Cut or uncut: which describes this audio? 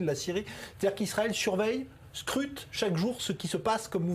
cut